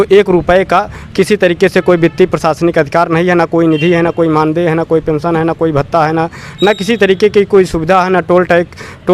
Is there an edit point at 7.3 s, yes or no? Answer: no